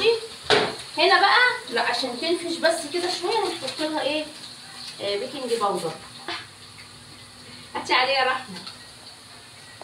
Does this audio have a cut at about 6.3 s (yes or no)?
yes